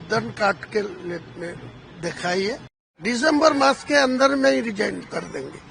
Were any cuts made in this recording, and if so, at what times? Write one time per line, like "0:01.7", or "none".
0:02.9